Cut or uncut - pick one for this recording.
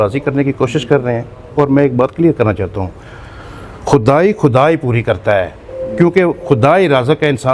uncut